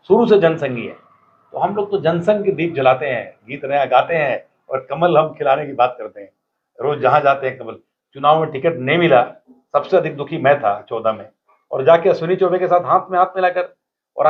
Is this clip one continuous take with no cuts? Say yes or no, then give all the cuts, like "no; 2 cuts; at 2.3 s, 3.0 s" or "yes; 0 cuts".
yes; 0 cuts